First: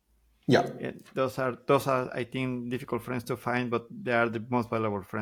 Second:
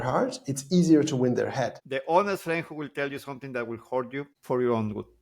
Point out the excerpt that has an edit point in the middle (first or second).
second